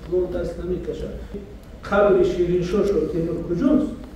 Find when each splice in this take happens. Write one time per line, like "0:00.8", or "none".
0:01.4